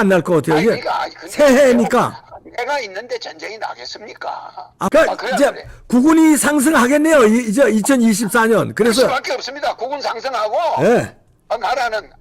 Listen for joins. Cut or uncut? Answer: cut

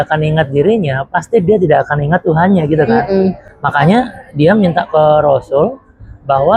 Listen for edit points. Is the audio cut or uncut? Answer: uncut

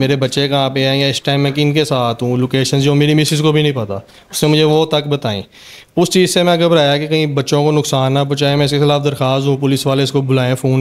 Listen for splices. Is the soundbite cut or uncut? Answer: uncut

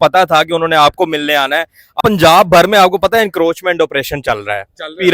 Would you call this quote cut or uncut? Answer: cut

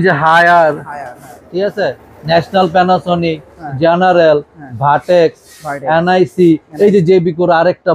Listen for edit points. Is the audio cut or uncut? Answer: uncut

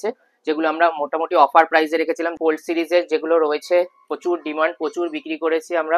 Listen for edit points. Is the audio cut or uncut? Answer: cut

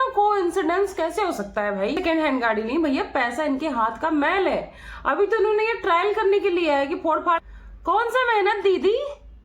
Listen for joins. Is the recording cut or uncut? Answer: cut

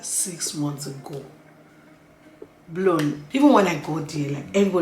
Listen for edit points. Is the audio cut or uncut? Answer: cut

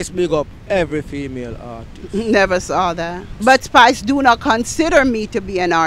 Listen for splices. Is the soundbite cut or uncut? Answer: cut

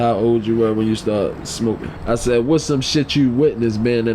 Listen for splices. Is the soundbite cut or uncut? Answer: cut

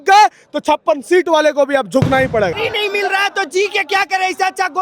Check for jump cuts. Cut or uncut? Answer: cut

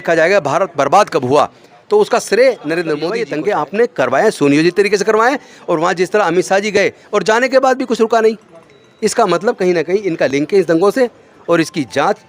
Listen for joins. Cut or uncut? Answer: cut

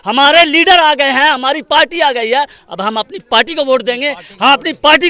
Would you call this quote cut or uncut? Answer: uncut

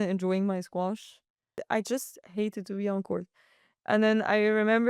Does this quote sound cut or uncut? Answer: cut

